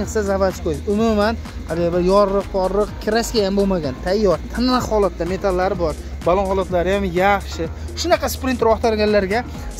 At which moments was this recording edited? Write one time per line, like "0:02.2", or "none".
none